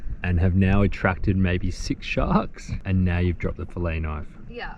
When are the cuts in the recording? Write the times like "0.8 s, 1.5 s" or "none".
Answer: 2.7 s